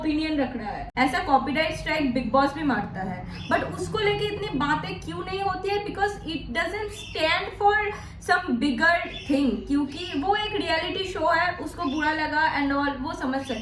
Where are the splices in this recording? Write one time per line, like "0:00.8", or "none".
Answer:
0:00.9